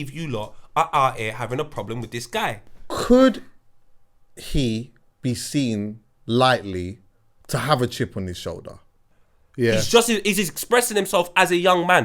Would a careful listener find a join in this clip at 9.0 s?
yes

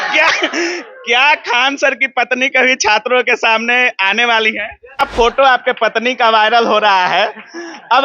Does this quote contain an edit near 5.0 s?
yes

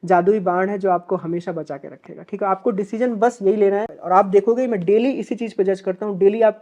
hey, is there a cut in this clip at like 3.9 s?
yes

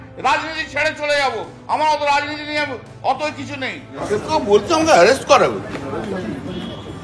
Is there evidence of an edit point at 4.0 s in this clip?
yes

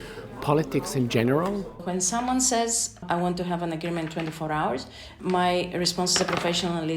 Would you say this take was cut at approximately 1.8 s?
yes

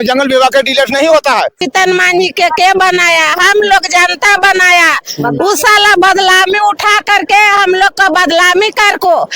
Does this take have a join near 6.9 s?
no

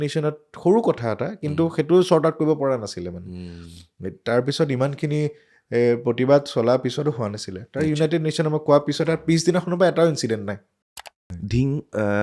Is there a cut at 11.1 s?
yes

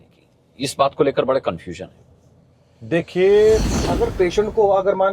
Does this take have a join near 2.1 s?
no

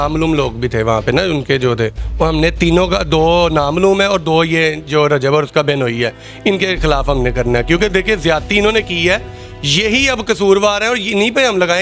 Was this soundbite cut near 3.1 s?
no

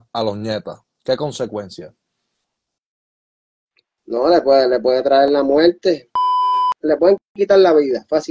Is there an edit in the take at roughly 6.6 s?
yes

